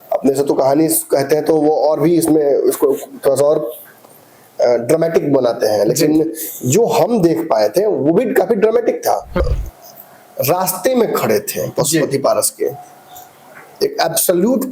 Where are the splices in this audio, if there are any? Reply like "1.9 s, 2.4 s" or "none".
9.4 s